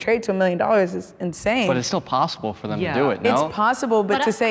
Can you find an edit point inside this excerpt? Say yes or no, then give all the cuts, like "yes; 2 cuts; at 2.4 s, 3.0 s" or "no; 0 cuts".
no; 0 cuts